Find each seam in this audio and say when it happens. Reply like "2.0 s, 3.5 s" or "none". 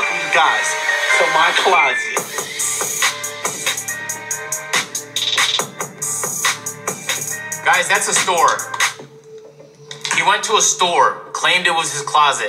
none